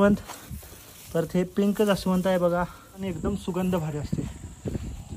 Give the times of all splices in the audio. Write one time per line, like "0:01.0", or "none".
0:03.0